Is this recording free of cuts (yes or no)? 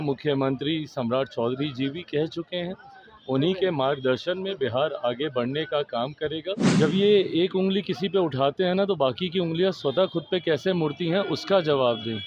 no